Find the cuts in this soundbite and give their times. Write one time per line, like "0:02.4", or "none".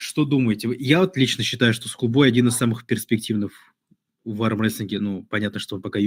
none